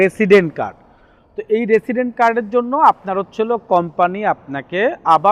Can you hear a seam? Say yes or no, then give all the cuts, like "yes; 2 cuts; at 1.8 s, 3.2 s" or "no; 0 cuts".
no; 0 cuts